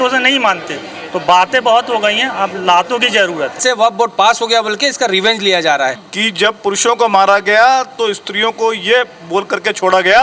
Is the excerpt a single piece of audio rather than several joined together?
no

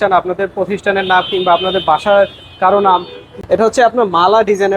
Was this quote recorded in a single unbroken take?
no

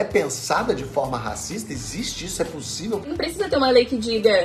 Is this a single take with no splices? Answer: no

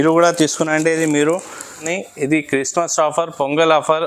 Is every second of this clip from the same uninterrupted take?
no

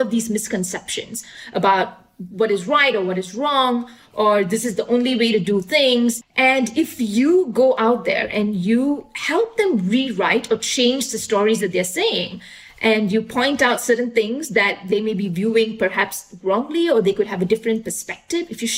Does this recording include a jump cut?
yes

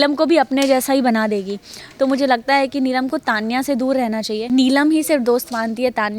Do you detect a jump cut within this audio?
yes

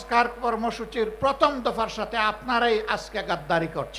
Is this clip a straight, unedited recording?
yes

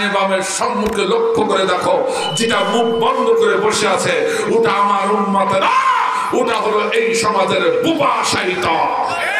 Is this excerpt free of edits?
yes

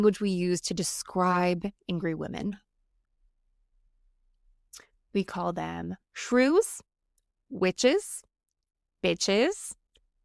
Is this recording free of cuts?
yes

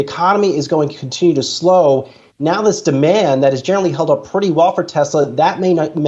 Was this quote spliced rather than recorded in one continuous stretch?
no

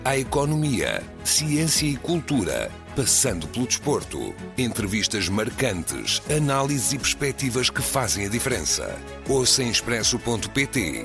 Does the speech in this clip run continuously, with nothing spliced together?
yes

